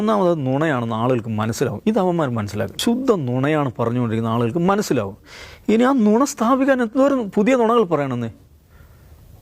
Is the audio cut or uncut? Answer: cut